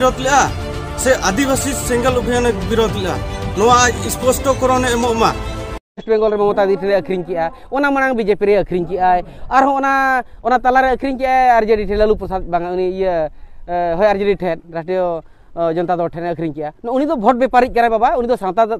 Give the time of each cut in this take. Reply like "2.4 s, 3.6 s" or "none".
5.9 s